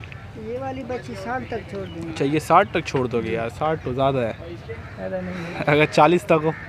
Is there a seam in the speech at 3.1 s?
no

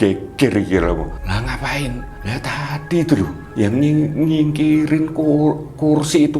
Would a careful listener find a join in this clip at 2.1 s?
yes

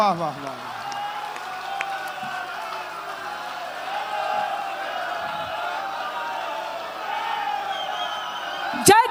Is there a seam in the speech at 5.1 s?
no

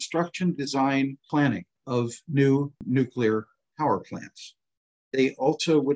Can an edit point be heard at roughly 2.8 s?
yes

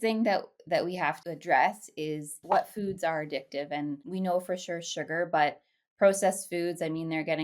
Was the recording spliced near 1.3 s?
yes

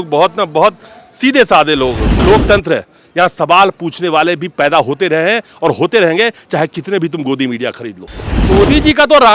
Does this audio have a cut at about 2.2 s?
yes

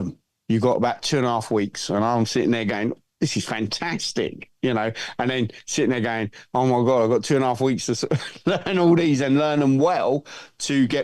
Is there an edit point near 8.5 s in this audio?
no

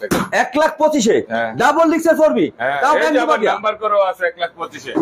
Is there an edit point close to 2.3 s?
no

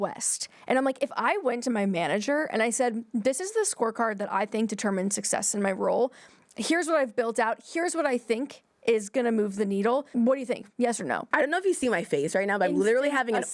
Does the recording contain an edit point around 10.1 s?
yes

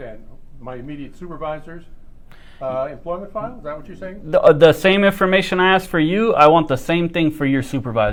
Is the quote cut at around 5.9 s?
no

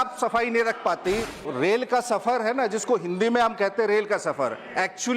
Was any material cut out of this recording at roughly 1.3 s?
yes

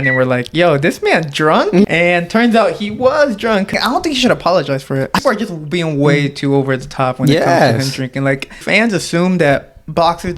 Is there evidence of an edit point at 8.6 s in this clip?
yes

